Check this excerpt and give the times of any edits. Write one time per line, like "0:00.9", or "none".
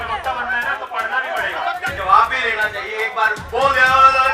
0:01.9

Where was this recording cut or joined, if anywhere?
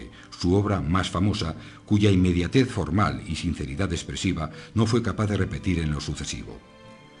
0:06.2

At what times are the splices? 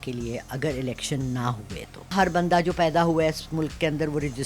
0:02.1

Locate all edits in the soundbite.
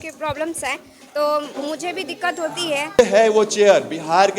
0:03.0

